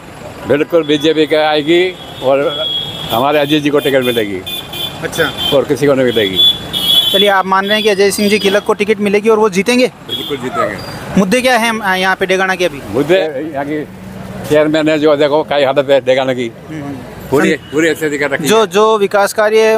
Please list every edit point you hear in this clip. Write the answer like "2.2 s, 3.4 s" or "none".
none

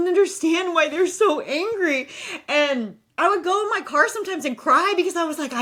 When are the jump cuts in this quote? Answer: none

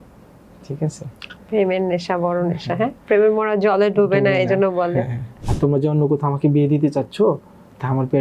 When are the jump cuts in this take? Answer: 5.3 s

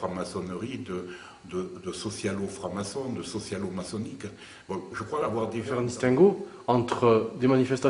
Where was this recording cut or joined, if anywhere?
5.7 s

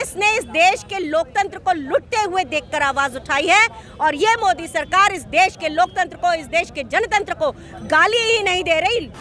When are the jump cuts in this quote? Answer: none

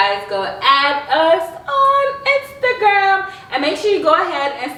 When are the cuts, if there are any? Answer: none

